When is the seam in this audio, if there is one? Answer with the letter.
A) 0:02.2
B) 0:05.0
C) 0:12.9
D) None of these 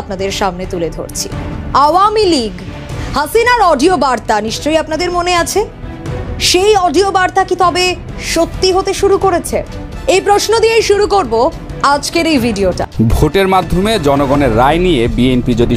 C